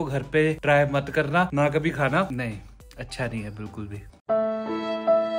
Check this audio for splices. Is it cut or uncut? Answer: uncut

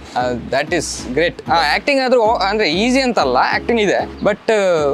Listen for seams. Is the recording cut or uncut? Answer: cut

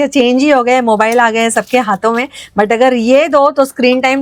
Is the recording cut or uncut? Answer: uncut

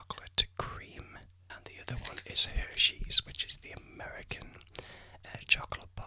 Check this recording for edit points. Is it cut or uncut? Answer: cut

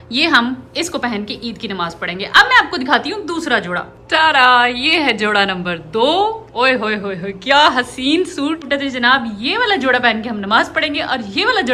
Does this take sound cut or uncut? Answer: cut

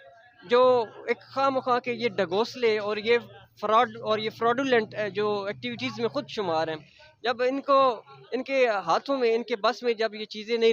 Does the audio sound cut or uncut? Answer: uncut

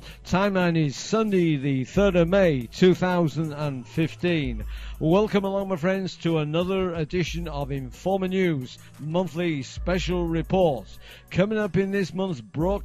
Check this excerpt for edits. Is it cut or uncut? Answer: cut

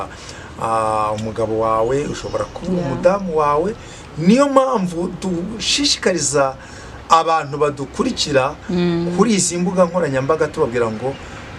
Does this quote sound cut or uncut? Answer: uncut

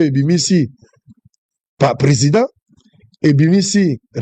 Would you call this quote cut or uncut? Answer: uncut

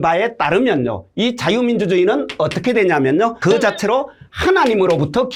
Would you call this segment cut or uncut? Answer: uncut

